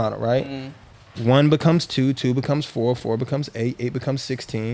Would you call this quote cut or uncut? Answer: uncut